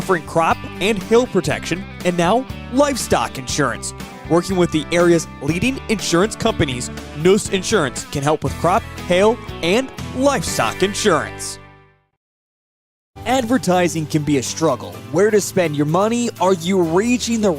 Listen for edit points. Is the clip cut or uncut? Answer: cut